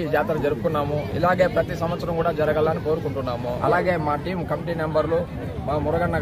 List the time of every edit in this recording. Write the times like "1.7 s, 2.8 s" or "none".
3.5 s